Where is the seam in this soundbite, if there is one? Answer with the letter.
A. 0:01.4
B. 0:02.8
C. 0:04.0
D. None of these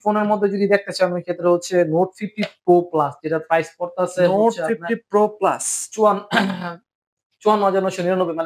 D